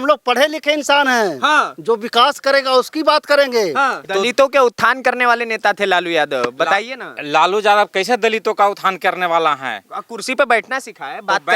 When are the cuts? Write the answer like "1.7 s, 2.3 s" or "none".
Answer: 4.0 s